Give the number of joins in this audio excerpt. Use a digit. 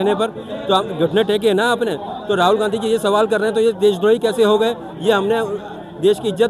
0